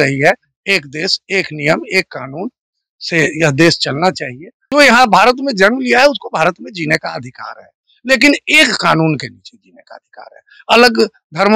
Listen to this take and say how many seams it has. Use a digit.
1